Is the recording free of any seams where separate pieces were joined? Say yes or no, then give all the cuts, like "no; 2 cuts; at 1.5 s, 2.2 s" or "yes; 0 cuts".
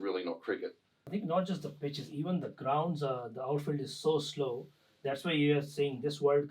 no; 1 cut; at 0.9 s